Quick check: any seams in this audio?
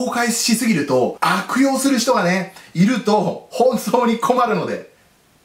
yes; 1 cut; at 1.2 s

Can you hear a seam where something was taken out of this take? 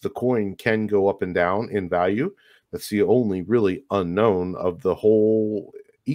no; 0 cuts

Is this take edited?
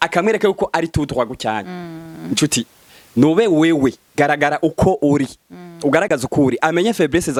no; 0 cuts

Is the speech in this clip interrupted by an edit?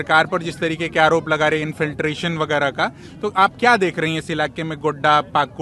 no; 0 cuts

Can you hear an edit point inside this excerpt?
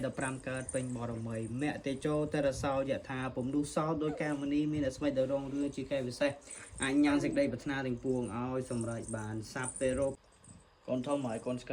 yes; 1 cut; at 10.2 s

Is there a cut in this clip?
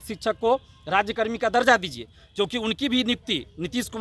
no; 0 cuts

